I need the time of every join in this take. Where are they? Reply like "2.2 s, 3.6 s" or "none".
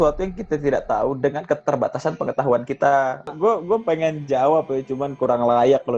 3.3 s